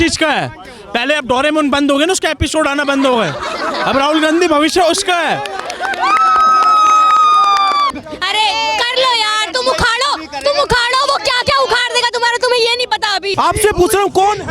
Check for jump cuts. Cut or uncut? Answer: cut